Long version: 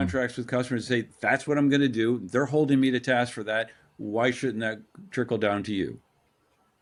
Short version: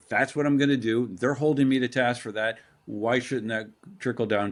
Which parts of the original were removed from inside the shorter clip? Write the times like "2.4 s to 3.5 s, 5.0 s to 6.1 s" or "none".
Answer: none